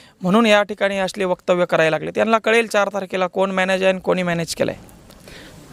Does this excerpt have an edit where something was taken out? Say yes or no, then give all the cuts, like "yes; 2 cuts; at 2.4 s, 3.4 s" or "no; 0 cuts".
no; 0 cuts